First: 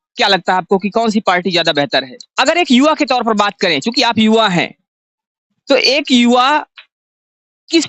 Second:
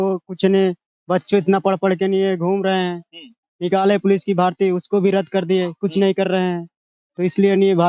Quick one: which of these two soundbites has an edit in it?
first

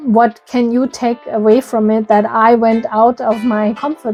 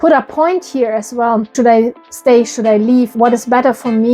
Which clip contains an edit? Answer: second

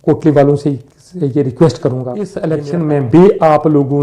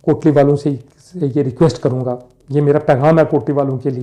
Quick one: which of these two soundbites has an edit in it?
first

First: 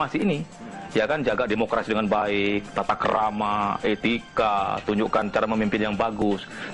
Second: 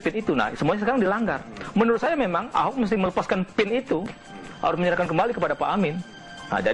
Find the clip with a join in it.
second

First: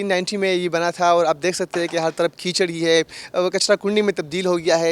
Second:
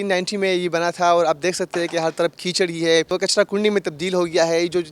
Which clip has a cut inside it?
second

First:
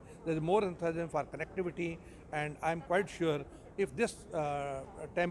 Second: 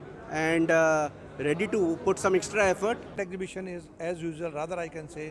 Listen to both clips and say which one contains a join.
second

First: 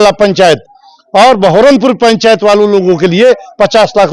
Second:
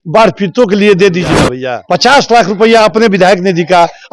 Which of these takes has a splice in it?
second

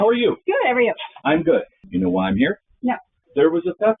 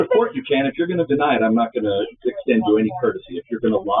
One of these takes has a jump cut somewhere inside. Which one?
first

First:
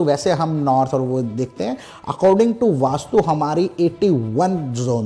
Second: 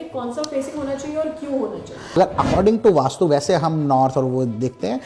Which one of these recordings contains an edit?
second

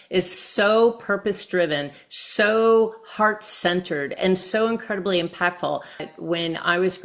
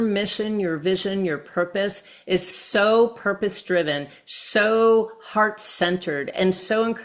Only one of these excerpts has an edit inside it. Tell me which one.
first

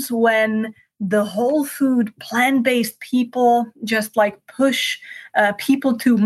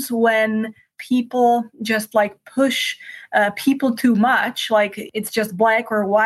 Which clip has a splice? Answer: second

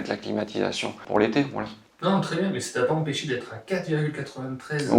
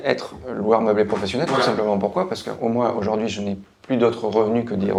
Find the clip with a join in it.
first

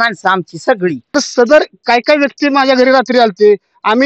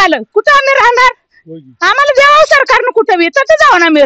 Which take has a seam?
first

